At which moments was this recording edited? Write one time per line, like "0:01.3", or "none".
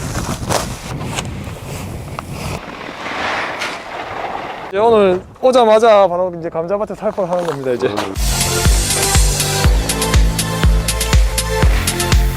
0:00.9
0:02.6
0:04.7
0:08.2

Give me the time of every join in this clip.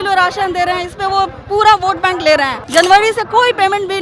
0:02.6

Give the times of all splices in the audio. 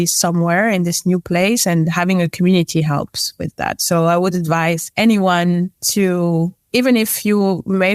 0:04.9
0:05.8
0:06.6

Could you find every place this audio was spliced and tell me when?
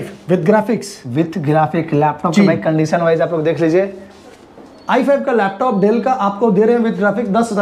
none

